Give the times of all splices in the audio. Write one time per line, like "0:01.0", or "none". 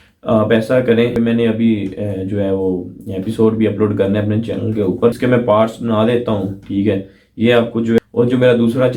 0:01.1
0:05.2
0:08.0